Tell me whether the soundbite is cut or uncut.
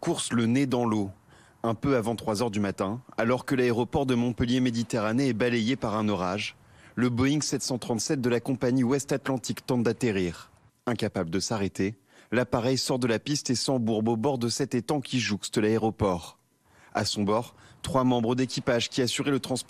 uncut